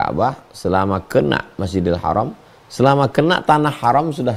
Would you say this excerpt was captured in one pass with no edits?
yes; 0 cuts

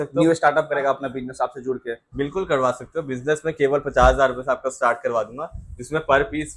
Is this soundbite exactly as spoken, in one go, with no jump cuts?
yes; 0 cuts

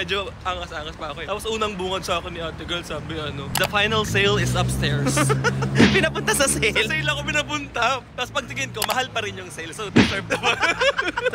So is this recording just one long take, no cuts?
yes; 0 cuts

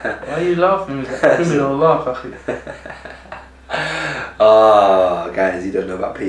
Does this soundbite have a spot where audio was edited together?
no; 0 cuts

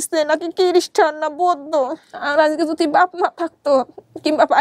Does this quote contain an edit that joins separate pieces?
yes; 1 cut; at 2.1 s

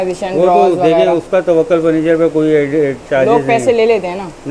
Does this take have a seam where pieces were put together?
no; 0 cuts

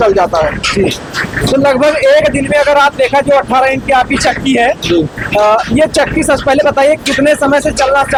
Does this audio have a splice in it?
no; 0 cuts

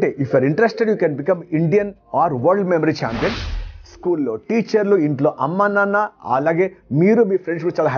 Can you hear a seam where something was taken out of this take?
yes; 1 cut; at 3.5 s

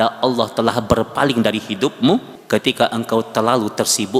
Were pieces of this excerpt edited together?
yes; 1 cut; at 2.3 s

